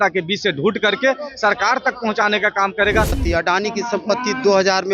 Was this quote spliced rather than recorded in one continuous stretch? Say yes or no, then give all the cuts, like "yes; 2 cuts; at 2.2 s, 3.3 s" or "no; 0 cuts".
yes; 1 cut; at 3.2 s